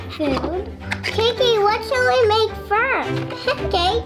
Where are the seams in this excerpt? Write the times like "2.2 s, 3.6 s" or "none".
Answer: 3.1 s